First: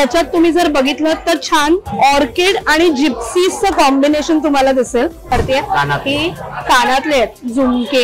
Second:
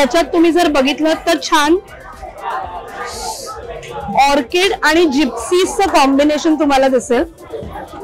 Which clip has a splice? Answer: first; 2 cuts; at 1.9 s, 5.3 s

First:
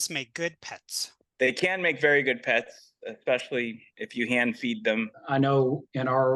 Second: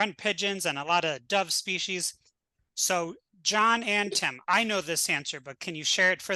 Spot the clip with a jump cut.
first; 2 cuts; at 1.2 s, 5.2 s

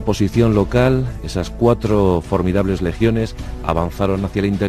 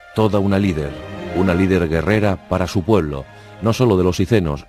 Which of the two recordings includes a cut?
first; 1 cut; at 1.2 s

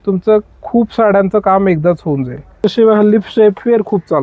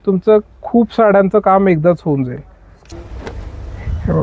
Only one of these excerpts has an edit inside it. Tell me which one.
first; 1 cut; at 2.5 s

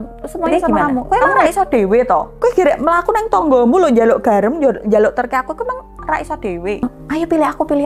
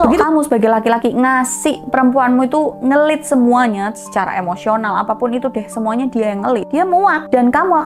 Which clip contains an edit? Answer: first; 2 cuts; at 1.0 s, 6.8 s

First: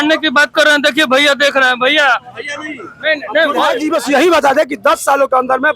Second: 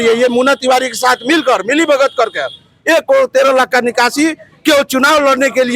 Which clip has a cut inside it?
first; 1 cut; at 3.8 s

